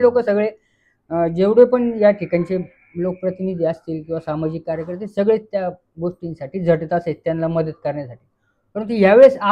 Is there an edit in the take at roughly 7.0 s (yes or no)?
no